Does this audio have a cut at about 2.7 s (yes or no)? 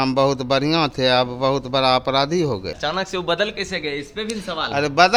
no